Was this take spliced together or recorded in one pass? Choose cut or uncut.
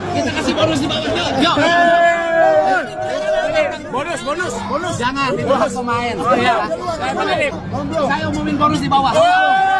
uncut